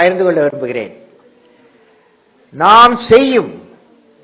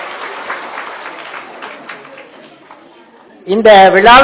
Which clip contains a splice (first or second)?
second